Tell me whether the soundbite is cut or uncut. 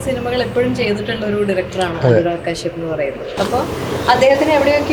uncut